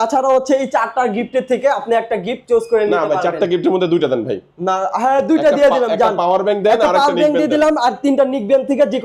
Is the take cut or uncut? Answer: uncut